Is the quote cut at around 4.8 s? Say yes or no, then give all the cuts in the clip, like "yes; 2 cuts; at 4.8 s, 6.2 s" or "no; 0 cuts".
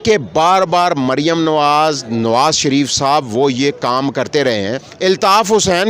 yes; 1 cut; at 4.8 s